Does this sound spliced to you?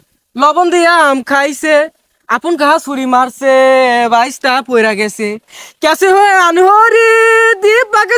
no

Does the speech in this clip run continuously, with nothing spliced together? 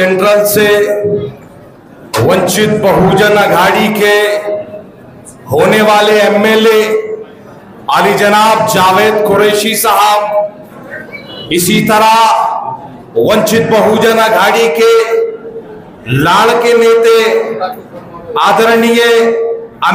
yes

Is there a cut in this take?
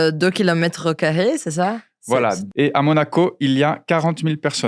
yes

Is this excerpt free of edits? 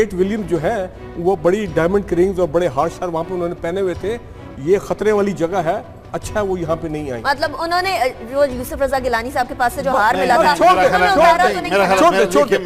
no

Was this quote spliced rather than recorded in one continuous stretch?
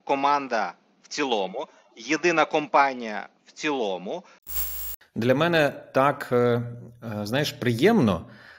yes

